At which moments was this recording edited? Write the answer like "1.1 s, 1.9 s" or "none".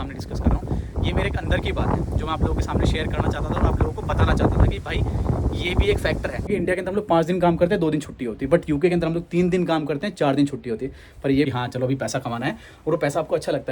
6.5 s, 11.5 s